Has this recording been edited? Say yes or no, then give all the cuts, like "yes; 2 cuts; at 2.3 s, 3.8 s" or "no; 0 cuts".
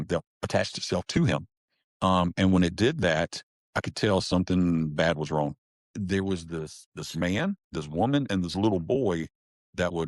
yes; 1 cut; at 5.8 s